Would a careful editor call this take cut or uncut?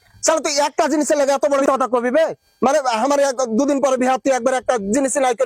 cut